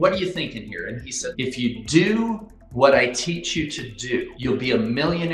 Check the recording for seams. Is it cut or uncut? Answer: cut